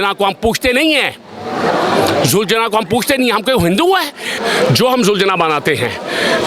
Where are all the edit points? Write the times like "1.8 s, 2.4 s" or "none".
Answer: 4.3 s